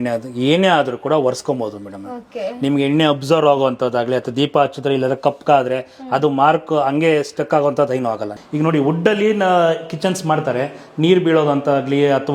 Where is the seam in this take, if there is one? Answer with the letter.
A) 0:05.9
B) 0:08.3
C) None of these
B